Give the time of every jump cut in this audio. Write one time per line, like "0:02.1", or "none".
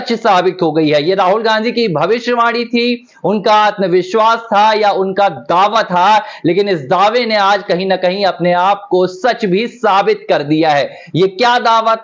0:04.2